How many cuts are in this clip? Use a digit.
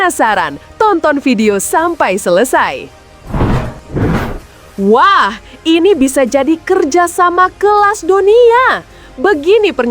1